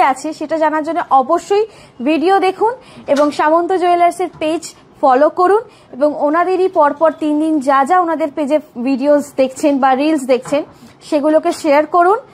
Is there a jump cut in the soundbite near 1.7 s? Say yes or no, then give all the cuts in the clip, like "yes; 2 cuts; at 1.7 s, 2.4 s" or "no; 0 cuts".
no; 0 cuts